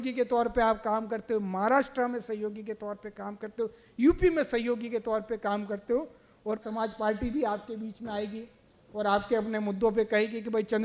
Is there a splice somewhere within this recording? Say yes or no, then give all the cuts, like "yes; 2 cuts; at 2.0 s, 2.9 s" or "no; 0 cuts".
yes; 1 cut; at 6.6 s